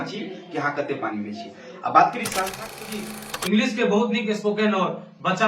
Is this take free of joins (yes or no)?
no